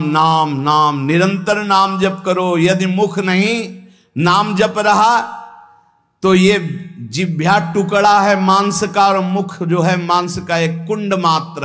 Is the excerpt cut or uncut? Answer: uncut